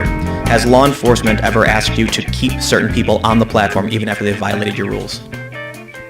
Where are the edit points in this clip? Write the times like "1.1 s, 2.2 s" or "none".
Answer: 5.1 s